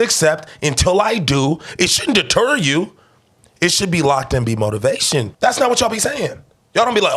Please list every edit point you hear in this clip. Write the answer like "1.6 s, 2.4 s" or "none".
5.3 s